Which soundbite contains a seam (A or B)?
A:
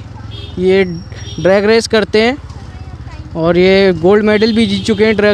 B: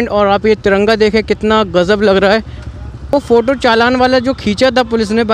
B